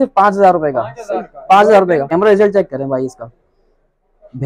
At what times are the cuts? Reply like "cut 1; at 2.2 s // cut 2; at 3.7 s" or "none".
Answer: cut 1; at 2.1 s